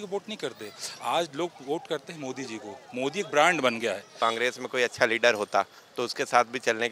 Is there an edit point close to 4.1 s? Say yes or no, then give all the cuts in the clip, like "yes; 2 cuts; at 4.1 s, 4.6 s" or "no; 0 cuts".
yes; 1 cut; at 4.1 s